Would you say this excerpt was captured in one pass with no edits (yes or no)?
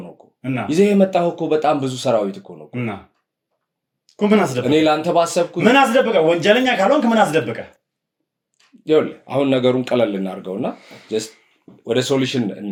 yes